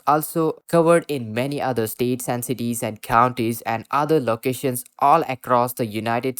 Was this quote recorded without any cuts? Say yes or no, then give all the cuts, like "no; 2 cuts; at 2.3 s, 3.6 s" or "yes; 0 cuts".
yes; 0 cuts